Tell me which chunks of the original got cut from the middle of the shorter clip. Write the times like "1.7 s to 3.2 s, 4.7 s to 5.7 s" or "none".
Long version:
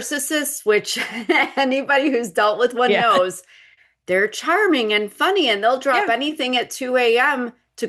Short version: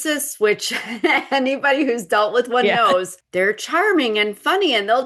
3.4 s to 3.9 s